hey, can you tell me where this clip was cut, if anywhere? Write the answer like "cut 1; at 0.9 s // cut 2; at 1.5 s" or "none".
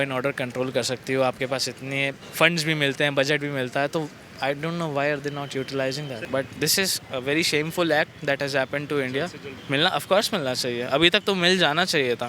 cut 1; at 2.2 s // cut 2; at 6.2 s // cut 3; at 9.5 s